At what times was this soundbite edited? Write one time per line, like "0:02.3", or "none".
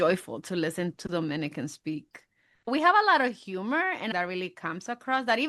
0:00.9
0:02.7
0:04.1